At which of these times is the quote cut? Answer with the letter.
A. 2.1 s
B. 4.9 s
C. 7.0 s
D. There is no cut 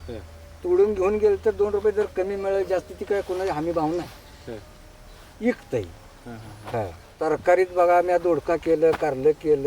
C